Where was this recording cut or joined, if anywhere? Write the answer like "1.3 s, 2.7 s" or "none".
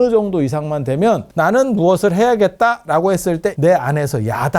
1.3 s, 3.6 s